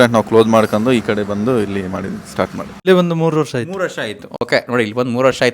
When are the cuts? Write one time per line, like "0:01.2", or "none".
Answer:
0:02.7